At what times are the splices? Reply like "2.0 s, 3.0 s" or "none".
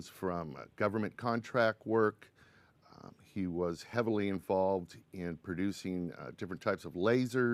3.5 s